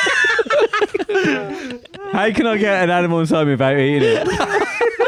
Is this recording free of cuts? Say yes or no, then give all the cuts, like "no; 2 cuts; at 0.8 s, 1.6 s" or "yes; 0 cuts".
yes; 0 cuts